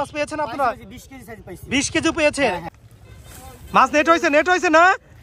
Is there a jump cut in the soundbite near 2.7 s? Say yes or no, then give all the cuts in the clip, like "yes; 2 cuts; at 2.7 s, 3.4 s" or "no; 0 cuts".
yes; 1 cut; at 2.7 s